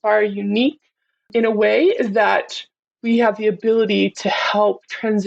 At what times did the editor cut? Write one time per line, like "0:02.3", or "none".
0:01.3